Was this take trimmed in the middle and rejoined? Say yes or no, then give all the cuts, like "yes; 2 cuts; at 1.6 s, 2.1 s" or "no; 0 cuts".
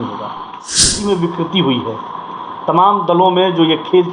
yes; 1 cut; at 1.0 s